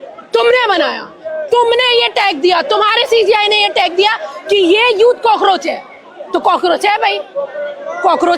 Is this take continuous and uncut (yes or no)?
yes